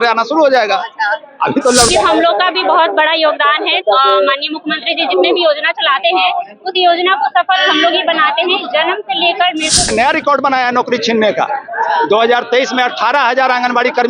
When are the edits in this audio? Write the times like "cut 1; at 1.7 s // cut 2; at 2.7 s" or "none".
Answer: cut 1; at 1.9 s // cut 2; at 9.9 s